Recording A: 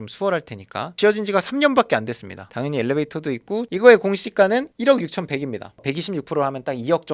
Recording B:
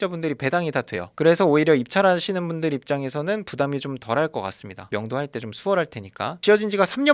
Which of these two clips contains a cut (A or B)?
A